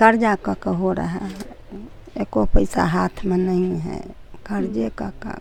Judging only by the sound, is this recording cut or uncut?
uncut